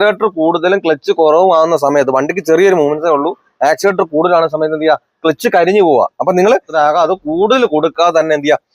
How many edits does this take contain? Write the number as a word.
one